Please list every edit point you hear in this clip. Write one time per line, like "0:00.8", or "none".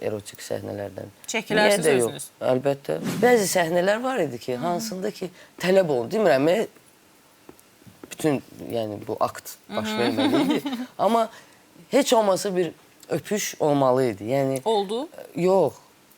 0:03.0